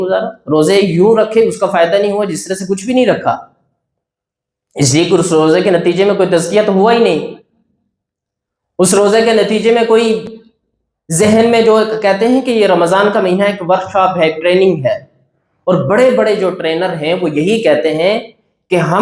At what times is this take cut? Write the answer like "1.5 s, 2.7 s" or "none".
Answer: none